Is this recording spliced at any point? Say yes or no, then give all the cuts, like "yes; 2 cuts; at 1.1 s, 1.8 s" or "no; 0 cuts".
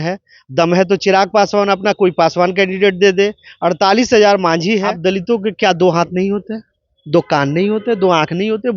yes; 1 cut; at 4.9 s